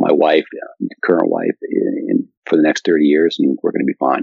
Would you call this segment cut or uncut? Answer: cut